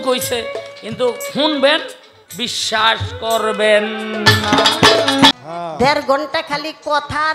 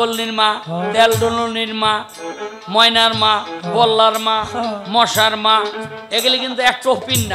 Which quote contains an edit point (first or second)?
first